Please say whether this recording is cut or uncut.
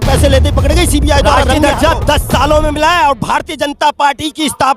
cut